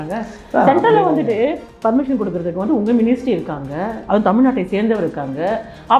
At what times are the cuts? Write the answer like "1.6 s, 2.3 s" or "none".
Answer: 1.7 s